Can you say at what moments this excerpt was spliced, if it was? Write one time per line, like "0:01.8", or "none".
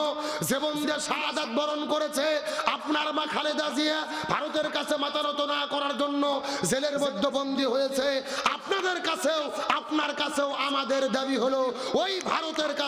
none